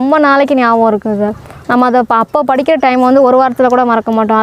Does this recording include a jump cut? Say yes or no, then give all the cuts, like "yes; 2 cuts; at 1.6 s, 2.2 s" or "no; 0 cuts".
no; 0 cuts